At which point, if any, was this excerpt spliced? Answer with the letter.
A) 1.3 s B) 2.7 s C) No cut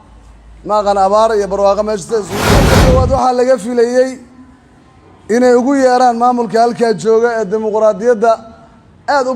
B